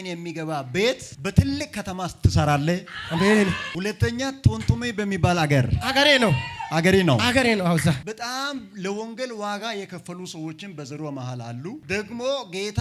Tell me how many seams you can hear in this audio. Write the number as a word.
two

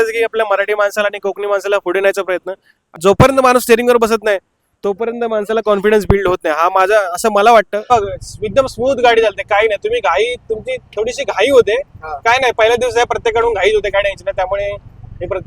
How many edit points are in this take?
two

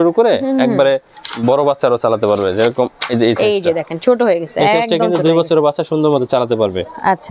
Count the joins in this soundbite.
zero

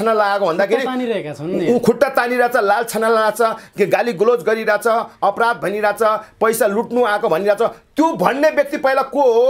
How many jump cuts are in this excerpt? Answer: zero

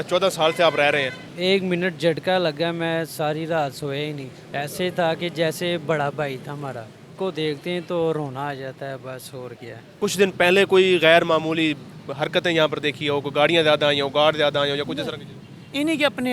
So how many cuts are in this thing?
four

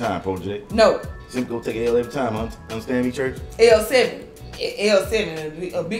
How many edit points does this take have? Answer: one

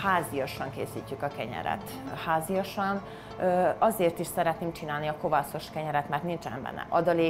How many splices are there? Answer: zero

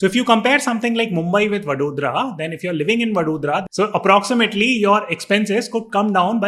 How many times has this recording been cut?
zero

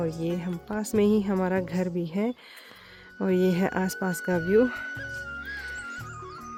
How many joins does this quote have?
zero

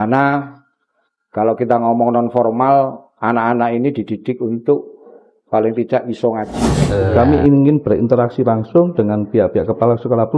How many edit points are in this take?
one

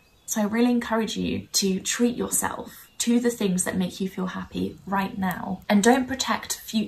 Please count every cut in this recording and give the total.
two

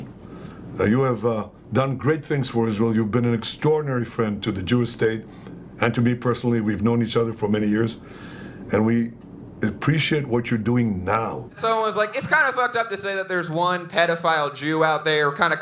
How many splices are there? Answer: one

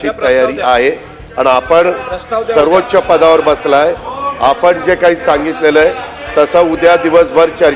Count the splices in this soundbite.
zero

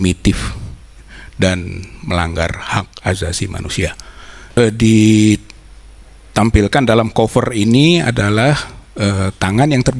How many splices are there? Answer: one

